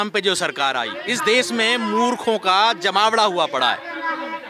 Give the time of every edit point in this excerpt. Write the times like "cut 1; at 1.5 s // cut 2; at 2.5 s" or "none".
cut 1; at 1.0 s